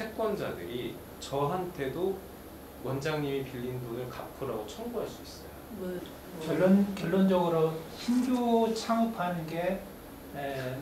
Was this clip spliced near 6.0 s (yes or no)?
yes